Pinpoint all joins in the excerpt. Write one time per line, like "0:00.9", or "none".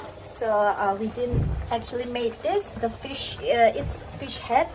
none